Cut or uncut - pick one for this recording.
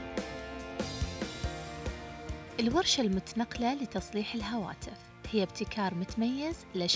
uncut